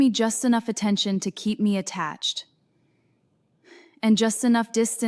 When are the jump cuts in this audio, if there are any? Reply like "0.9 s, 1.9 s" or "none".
none